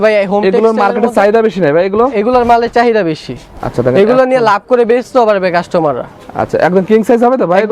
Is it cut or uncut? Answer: uncut